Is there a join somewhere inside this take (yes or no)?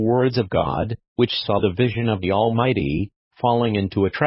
yes